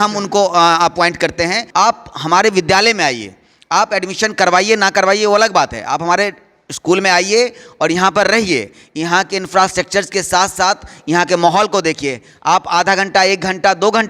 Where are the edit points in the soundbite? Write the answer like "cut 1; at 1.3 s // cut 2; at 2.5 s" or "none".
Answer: cut 1; at 1.6 s

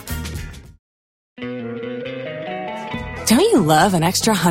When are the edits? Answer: cut 1; at 1.4 s

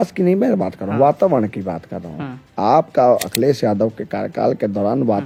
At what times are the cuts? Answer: none

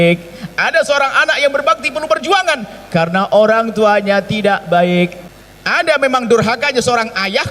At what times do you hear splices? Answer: cut 1; at 5.2 s

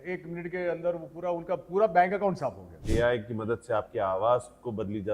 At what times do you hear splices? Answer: cut 1; at 2.7 s

